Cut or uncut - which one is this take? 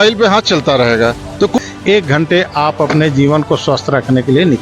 cut